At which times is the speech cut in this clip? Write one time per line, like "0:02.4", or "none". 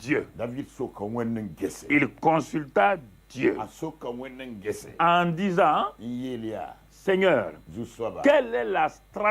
none